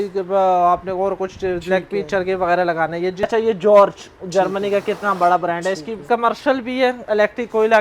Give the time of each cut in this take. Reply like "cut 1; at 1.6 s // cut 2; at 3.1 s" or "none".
cut 1; at 3.3 s // cut 2; at 6.1 s